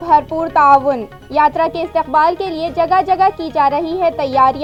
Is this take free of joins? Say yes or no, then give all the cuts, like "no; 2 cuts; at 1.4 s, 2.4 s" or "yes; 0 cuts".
yes; 0 cuts